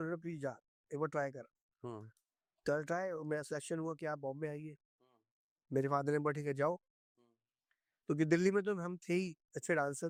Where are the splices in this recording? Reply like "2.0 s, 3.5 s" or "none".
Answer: none